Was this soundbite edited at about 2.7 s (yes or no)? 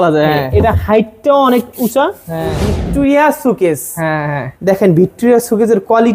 yes